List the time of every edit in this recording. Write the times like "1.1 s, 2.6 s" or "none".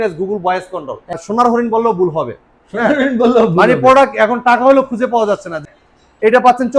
1.1 s, 5.6 s